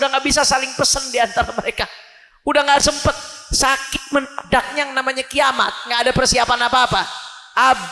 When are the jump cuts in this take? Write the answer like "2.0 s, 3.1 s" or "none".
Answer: none